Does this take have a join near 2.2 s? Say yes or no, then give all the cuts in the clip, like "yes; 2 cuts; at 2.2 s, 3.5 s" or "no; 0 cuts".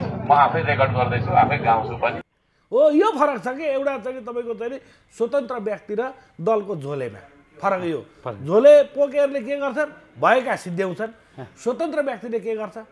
yes; 1 cut; at 2.2 s